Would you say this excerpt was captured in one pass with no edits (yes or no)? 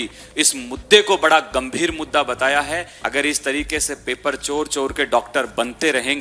no